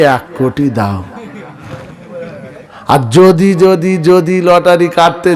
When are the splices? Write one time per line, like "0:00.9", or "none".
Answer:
0:02.7